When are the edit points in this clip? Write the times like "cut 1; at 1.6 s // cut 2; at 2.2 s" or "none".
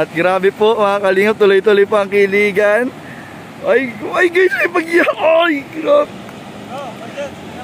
cut 1; at 6.1 s

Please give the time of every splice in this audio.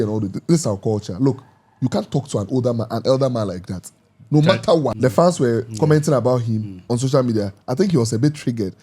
cut 1; at 4.9 s

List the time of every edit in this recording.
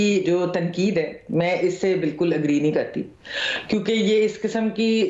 none

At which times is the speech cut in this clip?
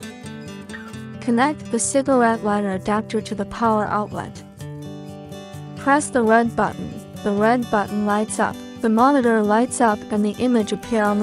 cut 1; at 1.1 s // cut 2; at 4.4 s // cut 3; at 5.7 s // cut 4; at 8.6 s

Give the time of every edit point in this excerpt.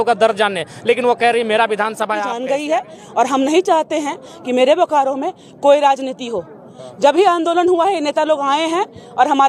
cut 1; at 2.3 s

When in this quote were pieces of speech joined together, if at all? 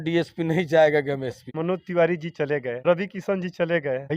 cut 1; at 1.5 s

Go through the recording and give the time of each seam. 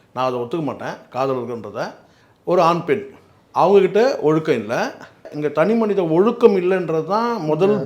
cut 1; at 5.3 s

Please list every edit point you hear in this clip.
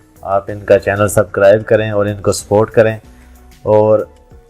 none

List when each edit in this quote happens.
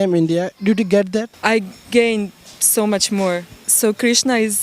cut 1; at 1.3 s // cut 2; at 3.6 s

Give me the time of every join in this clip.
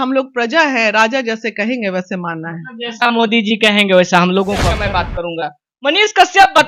cut 1; at 4.8 s

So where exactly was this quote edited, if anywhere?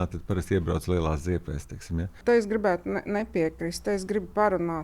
cut 1; at 2.2 s

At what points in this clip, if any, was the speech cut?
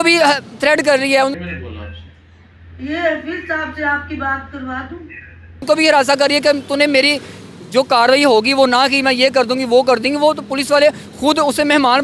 none

